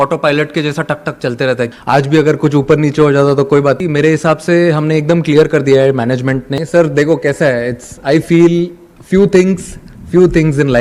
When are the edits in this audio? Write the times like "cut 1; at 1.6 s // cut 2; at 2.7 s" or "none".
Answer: cut 1; at 1.8 s // cut 2; at 3.8 s // cut 3; at 6.5 s